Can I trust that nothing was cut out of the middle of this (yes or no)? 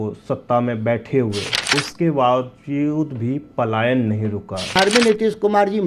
no